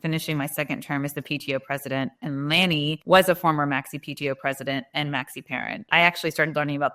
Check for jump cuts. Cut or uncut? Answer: cut